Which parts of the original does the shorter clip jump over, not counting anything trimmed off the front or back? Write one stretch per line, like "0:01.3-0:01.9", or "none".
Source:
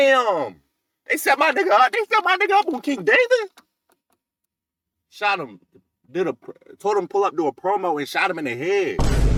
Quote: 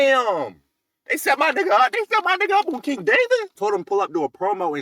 0:03.5-0:06.7